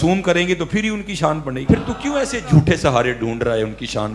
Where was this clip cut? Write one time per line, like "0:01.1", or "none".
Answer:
0:01.6